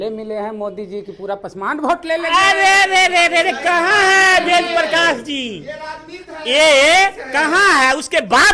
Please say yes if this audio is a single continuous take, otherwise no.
yes